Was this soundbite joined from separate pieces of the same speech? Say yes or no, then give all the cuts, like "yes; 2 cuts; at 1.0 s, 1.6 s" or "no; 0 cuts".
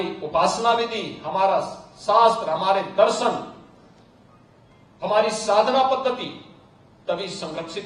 no; 0 cuts